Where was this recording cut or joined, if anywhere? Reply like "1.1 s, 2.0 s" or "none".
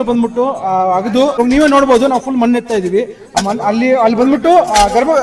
1.4 s